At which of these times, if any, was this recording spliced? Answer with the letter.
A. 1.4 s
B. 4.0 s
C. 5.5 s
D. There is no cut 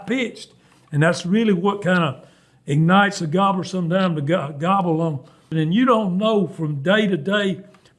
C